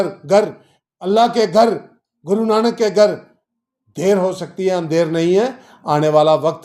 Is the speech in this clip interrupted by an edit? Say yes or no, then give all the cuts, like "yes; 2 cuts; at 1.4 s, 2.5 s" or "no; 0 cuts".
no; 0 cuts